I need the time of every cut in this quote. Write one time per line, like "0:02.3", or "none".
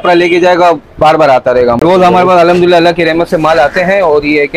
0:01.8